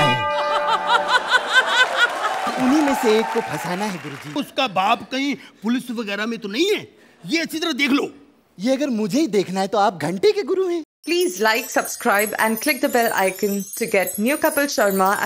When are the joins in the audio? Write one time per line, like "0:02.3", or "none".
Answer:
0:04.4
0:10.9